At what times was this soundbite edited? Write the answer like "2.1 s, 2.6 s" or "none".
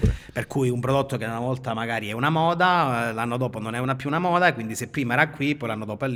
none